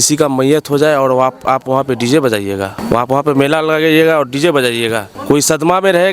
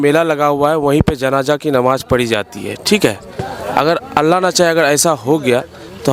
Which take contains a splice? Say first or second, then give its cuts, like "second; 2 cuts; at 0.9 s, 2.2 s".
first; 2 cuts; at 2.7 s, 5.1 s